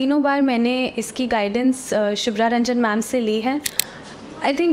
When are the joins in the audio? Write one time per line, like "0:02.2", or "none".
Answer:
0:03.8